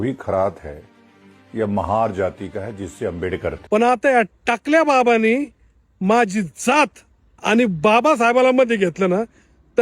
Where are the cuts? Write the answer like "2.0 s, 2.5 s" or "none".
3.5 s